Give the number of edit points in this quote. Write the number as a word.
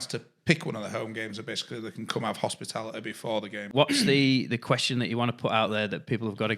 one